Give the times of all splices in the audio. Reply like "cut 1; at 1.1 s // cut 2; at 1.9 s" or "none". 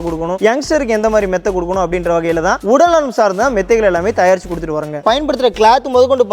cut 1; at 5.0 s